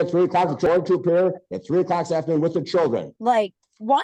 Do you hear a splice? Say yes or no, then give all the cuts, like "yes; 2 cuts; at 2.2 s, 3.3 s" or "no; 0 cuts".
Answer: yes; 1 cut; at 3.1 s